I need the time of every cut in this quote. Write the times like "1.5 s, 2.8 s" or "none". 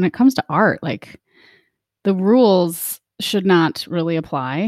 none